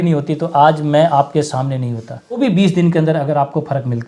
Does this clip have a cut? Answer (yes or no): yes